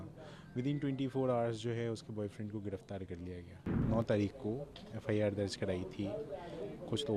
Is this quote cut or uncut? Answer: cut